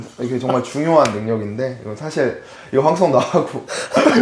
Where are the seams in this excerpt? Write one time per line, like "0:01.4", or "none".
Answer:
none

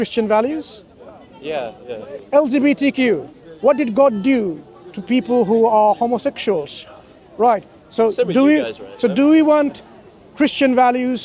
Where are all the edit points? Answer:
0:02.1

